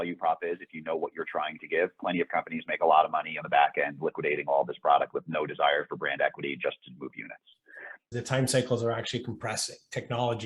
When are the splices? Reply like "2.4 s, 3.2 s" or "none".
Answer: 8.1 s